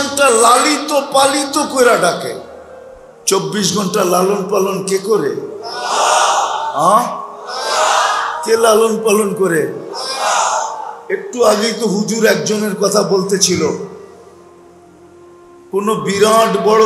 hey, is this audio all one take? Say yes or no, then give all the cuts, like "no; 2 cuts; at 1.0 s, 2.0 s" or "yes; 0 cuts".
no; 2 cuts; at 14.1 s, 15.4 s